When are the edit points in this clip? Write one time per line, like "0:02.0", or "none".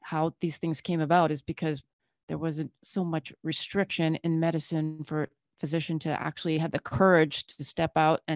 none